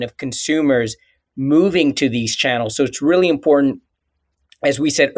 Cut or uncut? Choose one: uncut